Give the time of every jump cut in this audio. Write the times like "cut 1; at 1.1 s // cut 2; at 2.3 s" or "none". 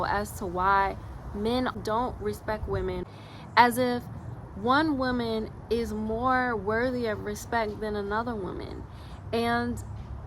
cut 1; at 1.7 s // cut 2; at 3.1 s